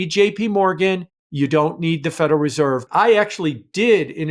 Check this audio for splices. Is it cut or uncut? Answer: cut